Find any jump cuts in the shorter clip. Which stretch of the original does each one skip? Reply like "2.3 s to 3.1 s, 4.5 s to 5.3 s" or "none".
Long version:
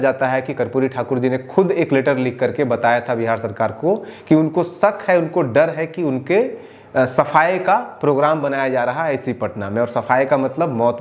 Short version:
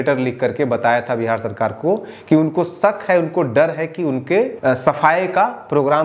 6.5 s to 6.9 s